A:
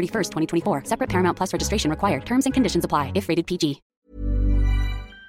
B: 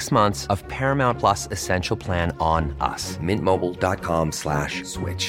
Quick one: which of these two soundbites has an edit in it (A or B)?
A